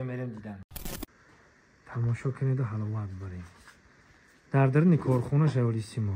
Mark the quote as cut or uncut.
cut